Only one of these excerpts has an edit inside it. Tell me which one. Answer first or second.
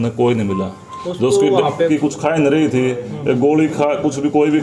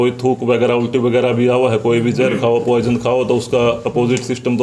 first